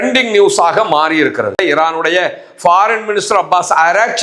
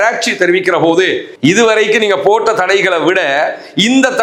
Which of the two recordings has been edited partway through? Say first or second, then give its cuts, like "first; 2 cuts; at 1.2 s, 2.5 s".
first; 1 cut; at 1.6 s